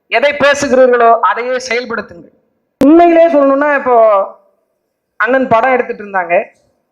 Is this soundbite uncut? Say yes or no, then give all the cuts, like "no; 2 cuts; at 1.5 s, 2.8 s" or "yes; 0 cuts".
no; 1 cut; at 2.8 s